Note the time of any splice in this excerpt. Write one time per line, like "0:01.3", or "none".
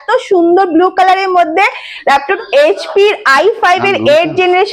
0:02.3